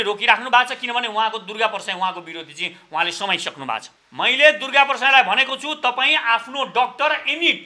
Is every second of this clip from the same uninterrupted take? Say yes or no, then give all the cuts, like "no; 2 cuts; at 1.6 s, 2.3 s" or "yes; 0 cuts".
no; 1 cut; at 4.0 s